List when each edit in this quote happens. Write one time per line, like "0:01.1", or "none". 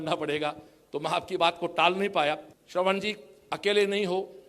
0:02.5